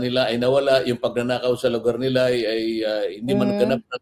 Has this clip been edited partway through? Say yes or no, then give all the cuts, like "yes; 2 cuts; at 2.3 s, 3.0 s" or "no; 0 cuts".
no; 0 cuts